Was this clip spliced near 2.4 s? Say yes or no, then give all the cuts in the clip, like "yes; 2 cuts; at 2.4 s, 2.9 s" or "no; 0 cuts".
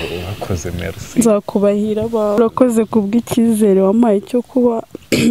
yes; 1 cut; at 2.4 s